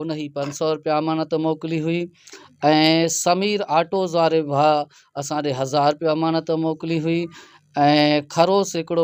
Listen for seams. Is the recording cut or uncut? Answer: uncut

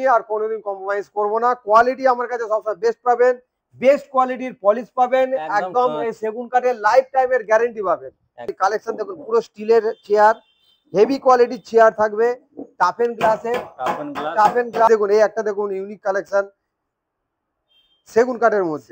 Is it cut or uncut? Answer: cut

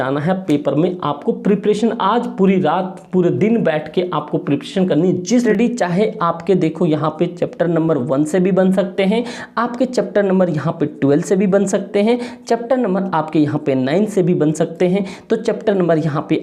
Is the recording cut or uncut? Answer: cut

